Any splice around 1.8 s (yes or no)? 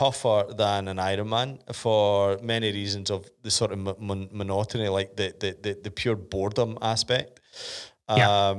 no